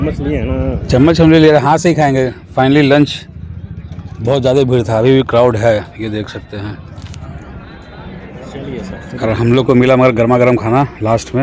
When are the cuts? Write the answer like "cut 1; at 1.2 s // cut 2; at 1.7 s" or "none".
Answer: none